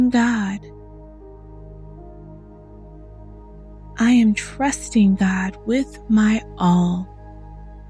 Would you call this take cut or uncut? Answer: cut